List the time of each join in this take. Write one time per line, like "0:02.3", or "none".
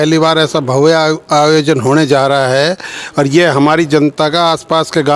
none